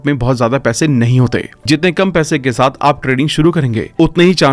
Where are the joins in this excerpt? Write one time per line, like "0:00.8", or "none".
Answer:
none